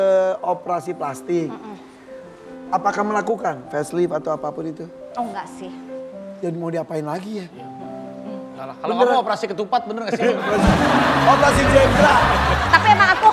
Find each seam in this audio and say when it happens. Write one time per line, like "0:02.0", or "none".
none